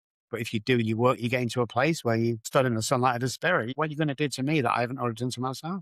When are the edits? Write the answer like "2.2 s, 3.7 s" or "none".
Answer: 2.5 s, 3.7 s